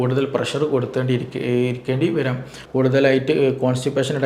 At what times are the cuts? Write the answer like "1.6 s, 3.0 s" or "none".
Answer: 2.6 s